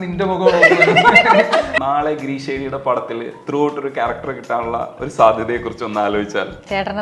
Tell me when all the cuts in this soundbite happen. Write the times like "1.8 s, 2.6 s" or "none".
1.7 s